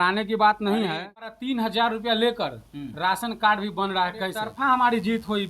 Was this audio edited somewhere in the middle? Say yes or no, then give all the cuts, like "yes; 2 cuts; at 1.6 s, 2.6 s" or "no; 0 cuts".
yes; 2 cuts; at 1.4 s, 4.4 s